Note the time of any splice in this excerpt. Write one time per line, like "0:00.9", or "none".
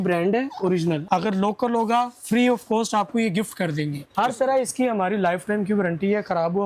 0:01.0
0:04.0